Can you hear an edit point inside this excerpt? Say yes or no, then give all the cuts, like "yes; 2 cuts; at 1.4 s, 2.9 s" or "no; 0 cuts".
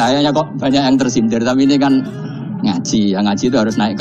no; 0 cuts